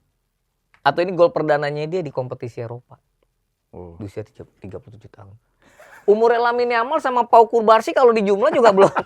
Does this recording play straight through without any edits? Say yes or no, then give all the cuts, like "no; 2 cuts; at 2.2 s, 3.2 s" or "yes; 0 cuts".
yes; 0 cuts